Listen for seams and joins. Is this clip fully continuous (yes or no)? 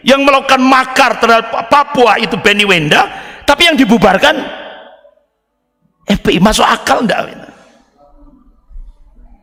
yes